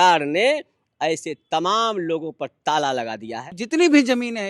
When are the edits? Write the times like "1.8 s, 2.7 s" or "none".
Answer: 3.5 s